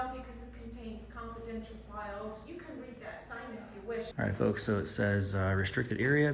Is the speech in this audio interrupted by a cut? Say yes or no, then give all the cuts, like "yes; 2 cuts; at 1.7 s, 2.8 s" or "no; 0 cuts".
yes; 1 cut; at 4.1 s